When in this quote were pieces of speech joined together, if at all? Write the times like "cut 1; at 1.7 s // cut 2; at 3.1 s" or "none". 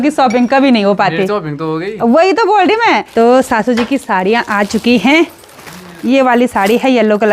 cut 1; at 3.1 s